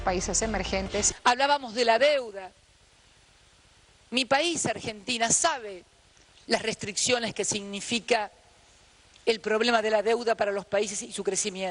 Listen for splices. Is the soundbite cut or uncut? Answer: uncut